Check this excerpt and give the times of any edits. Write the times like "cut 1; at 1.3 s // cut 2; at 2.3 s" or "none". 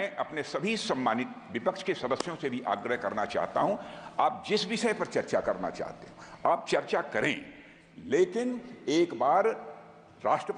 none

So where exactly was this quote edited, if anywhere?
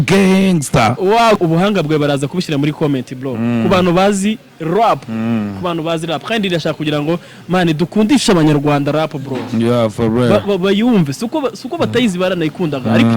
cut 1; at 1.4 s

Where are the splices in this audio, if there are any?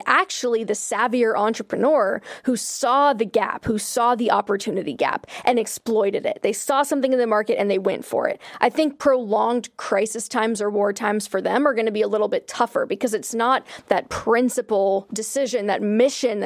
cut 1; at 15.2 s

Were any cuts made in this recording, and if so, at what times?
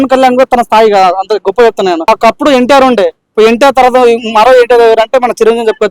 cut 1; at 2.1 s

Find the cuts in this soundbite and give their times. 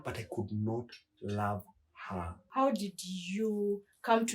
cut 1; at 2.4 s

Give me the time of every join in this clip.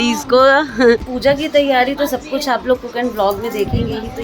cut 1; at 1.1 s

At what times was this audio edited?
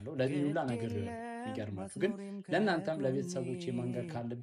none

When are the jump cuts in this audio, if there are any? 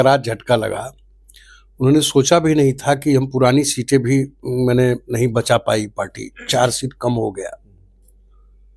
none

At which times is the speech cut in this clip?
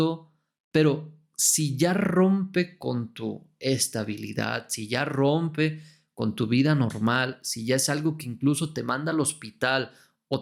none

